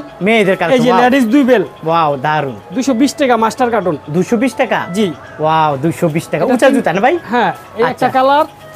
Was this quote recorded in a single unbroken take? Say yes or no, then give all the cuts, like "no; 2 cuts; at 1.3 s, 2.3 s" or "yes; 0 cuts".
yes; 0 cuts